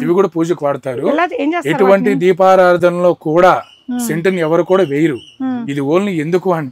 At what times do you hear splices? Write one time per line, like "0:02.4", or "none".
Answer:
none